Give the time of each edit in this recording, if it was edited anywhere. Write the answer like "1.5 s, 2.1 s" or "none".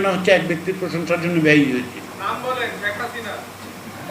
2.1 s